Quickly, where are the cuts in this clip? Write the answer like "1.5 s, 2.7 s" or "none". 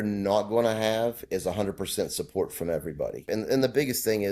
3.2 s